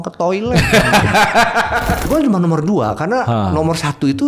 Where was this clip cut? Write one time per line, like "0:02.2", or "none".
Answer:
0:02.0